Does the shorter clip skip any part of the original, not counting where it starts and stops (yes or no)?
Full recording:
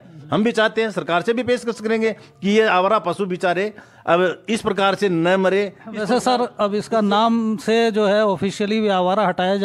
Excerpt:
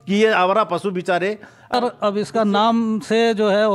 yes